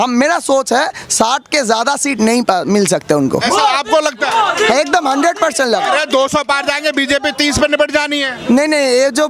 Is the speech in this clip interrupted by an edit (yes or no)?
no